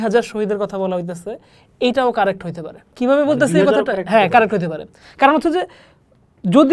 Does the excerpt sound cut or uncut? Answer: uncut